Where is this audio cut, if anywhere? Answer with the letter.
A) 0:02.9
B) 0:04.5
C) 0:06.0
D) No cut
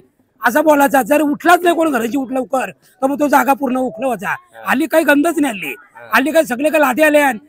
D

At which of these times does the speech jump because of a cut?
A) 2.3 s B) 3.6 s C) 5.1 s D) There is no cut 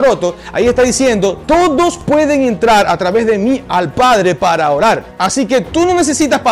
C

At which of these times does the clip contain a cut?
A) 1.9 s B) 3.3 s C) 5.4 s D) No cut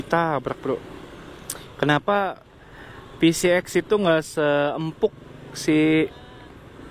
D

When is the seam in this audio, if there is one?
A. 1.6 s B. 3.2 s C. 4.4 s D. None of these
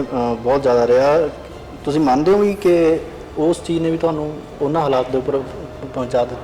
C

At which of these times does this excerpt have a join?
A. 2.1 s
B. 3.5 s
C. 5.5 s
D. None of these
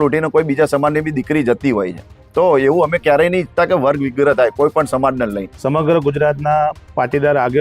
C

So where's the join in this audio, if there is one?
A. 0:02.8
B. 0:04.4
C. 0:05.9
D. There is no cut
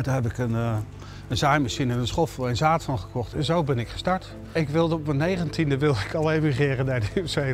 B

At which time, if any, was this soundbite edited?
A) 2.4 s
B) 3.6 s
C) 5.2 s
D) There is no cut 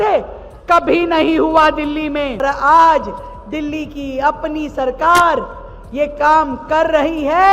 A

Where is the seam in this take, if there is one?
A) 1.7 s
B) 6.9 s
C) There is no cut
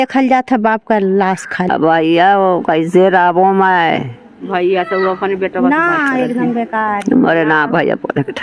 A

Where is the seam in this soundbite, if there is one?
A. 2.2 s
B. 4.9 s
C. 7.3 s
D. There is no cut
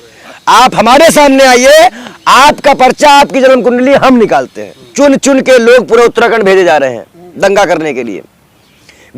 B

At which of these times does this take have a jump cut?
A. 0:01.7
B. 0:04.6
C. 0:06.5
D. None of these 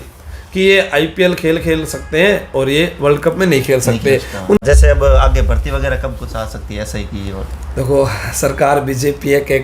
B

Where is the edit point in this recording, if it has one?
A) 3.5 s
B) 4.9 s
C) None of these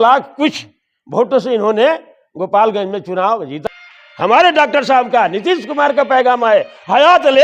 A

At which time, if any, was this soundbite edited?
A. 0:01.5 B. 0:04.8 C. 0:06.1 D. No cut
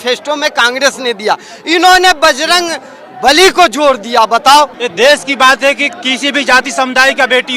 B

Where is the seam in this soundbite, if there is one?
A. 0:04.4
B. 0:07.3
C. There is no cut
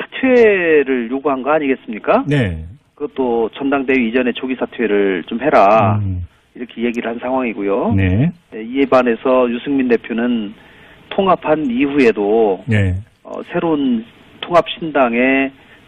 C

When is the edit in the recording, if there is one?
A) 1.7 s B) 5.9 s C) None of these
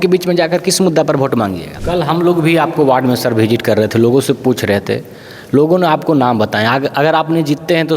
A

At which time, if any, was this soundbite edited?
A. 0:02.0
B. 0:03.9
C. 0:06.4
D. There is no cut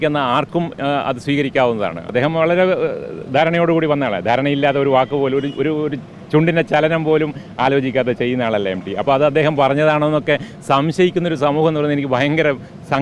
A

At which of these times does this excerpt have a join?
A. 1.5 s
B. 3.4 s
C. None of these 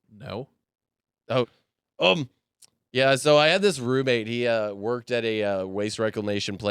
A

